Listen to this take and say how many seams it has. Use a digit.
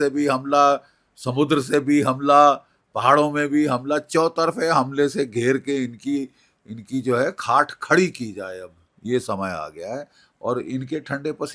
0